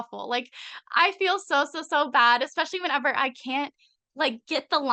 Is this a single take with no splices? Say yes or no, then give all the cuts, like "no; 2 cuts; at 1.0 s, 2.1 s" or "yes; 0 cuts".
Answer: yes; 0 cuts